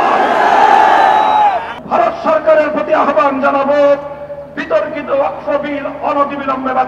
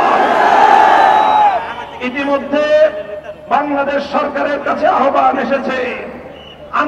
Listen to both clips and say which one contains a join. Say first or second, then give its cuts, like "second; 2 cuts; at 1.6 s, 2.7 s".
first; 1 cut; at 1.7 s